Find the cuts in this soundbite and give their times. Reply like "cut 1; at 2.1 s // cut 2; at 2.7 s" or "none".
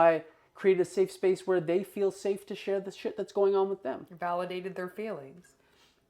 none